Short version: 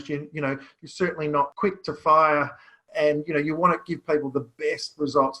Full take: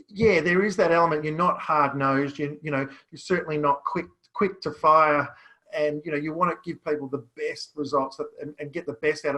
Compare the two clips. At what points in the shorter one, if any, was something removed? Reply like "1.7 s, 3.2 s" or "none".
1.5 s

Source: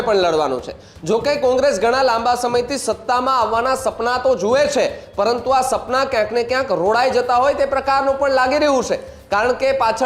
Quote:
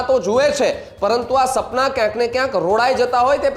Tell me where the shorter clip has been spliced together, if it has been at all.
none

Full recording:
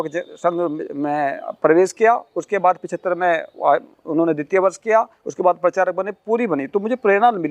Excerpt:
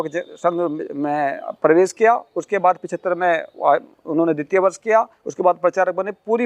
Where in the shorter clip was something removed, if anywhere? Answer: none

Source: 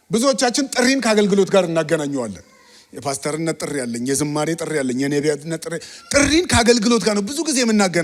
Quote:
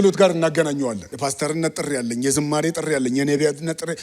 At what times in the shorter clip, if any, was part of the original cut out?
1.1 s

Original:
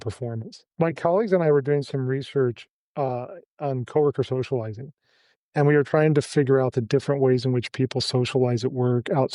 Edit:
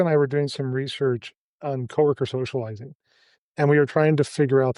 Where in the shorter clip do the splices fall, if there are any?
1.4 s

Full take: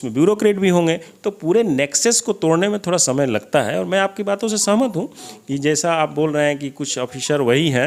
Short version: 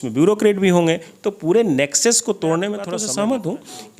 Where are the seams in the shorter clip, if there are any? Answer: 2.9 s

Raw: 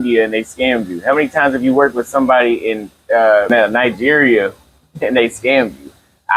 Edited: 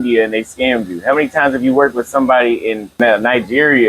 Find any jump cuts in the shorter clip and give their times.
3.0 s

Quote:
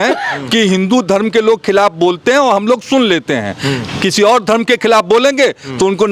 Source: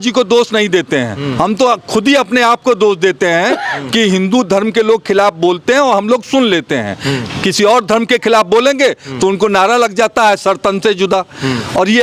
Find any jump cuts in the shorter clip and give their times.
none

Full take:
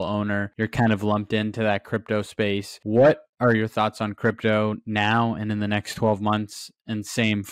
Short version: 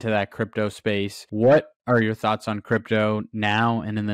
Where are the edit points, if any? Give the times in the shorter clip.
none

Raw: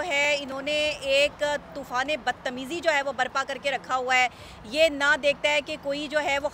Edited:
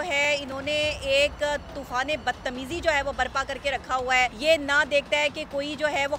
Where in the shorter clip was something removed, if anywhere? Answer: 4.4 s

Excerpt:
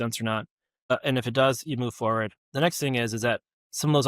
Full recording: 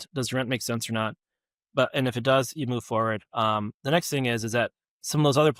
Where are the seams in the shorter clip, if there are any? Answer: 0.9 s, 2.4 s

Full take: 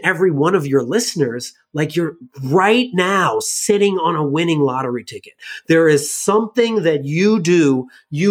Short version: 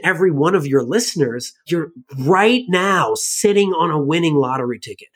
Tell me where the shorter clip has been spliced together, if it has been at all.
1.6 s

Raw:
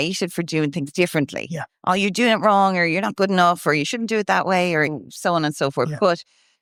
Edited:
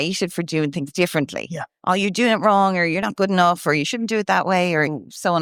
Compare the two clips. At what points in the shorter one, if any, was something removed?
none

